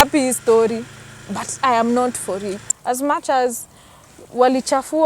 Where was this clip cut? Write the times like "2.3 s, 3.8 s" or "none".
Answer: 2.6 s